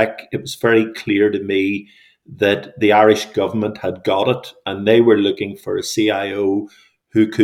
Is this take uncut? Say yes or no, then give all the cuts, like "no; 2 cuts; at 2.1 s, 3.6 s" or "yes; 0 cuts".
yes; 0 cuts